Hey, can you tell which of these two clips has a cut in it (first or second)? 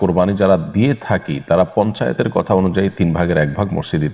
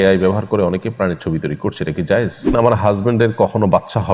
second